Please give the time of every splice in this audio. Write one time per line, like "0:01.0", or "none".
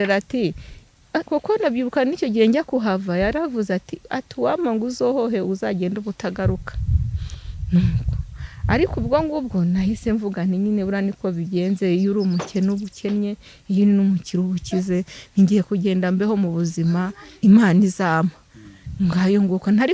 none